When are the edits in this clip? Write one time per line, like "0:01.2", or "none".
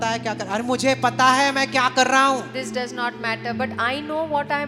none